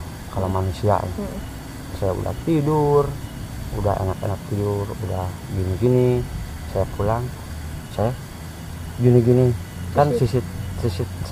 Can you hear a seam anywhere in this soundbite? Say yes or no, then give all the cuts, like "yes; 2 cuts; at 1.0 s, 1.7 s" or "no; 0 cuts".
no; 0 cuts